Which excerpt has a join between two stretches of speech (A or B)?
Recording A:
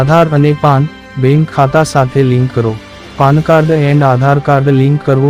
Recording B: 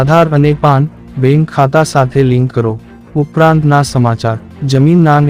B